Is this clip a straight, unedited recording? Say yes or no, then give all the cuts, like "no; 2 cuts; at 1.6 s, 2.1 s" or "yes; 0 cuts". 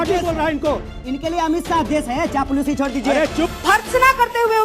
no; 1 cut; at 3.5 s